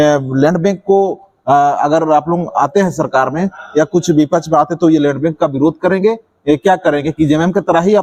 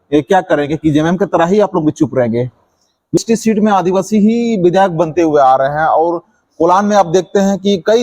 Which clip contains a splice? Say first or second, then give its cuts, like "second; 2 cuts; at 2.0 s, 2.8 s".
second; 1 cut; at 3.2 s